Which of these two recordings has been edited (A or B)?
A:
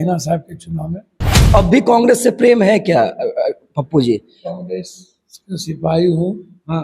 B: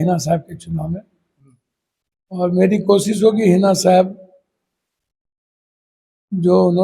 A